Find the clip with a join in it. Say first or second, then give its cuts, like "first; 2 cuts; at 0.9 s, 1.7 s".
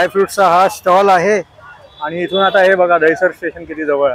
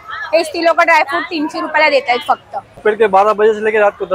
second; 1 cut; at 2.7 s